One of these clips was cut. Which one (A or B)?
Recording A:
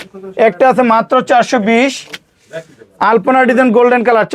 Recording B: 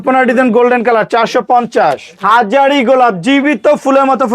B